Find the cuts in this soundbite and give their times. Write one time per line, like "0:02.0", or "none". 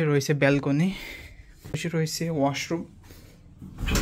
0:01.7

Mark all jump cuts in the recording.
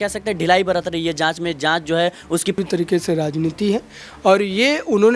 0:02.6

